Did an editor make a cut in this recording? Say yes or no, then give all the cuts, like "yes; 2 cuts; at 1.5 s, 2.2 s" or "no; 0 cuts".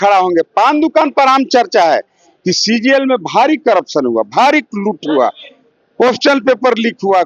no; 0 cuts